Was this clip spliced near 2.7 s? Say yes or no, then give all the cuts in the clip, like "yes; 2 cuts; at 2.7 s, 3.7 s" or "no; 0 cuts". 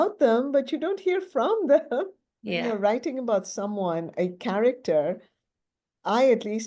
yes; 1 cut; at 2.7 s